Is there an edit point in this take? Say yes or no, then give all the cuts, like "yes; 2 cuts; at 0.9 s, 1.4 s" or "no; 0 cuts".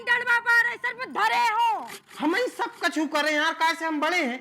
yes; 1 cut; at 1.9 s